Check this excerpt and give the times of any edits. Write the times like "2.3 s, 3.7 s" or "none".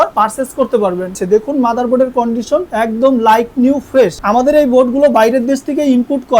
1.2 s